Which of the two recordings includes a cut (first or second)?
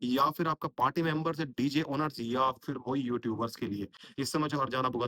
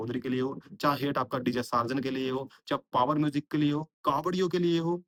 first